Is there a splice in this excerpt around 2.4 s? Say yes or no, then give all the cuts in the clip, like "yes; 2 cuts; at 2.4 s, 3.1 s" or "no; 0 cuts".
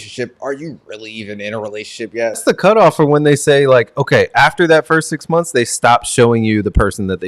yes; 1 cut; at 2.4 s